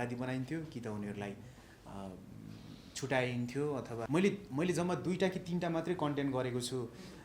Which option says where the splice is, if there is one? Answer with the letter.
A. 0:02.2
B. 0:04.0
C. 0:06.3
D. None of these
B